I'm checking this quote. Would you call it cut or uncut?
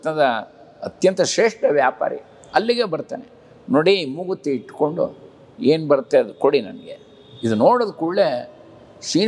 uncut